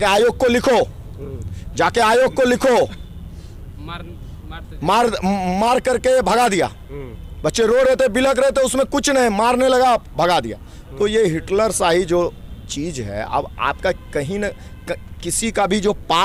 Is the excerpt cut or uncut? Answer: uncut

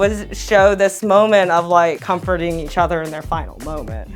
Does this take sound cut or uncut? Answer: cut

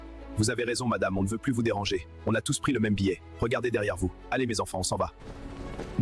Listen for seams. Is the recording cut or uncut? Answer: cut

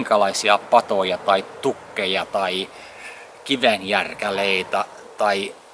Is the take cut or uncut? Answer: uncut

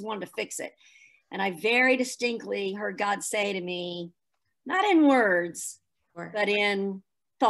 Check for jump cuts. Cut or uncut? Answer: uncut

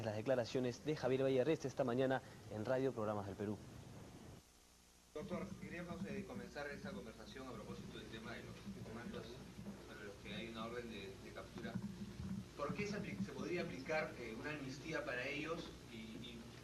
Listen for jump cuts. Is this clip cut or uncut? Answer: cut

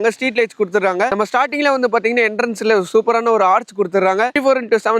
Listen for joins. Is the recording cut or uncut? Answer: uncut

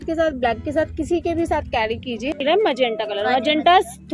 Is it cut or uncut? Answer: cut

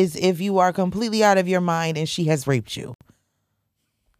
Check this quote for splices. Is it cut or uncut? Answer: uncut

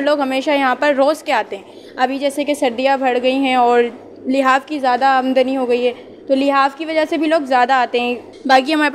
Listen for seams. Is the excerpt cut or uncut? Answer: uncut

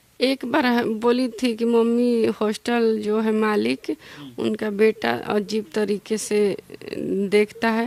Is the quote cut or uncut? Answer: uncut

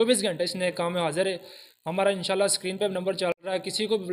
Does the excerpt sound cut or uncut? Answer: uncut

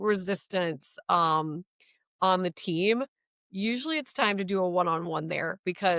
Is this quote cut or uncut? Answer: uncut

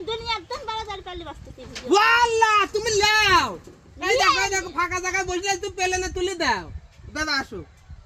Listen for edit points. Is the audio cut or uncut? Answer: uncut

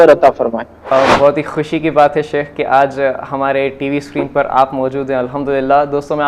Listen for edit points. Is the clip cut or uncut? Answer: cut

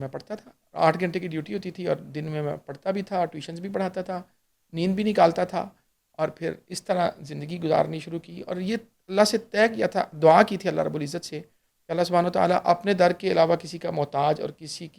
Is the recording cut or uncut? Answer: uncut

